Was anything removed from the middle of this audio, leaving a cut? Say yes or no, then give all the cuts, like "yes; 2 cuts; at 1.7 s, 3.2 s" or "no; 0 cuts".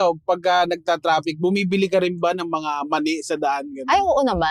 no; 0 cuts